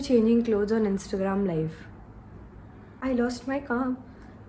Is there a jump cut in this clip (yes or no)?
yes